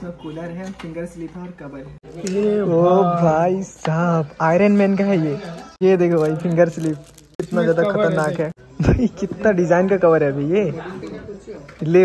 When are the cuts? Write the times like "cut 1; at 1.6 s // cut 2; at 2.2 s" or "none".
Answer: cut 1; at 2.0 s // cut 2; at 5.7 s // cut 3; at 8.6 s